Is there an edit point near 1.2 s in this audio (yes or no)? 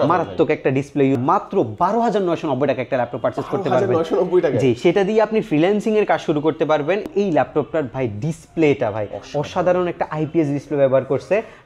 yes